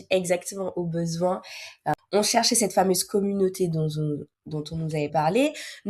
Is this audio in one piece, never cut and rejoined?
no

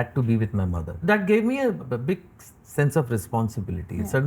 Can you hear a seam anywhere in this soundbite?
yes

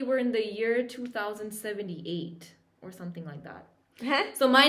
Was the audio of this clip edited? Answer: no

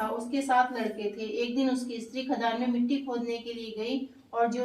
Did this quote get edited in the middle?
no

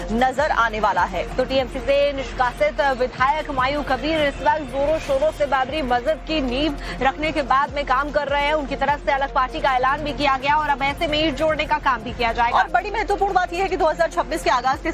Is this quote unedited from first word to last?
yes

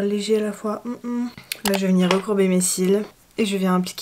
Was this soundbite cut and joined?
no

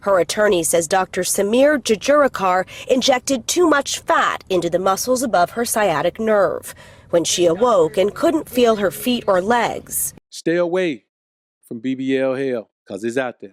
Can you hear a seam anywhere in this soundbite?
yes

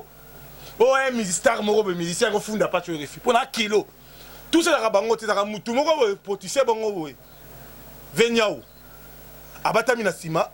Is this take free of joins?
yes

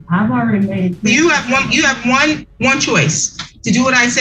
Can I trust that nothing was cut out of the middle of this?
no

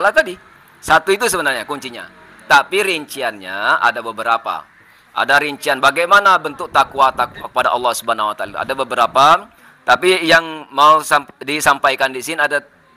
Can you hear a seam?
no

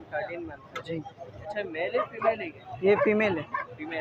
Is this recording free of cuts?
yes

